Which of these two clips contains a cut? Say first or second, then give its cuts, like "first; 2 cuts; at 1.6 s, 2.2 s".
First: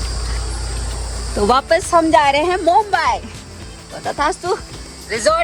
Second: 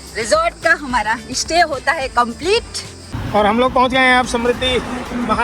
second; 1 cut; at 3.2 s